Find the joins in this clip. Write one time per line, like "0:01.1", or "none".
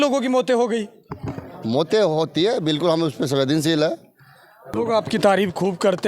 0:04.7